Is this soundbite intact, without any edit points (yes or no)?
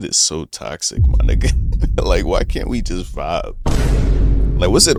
yes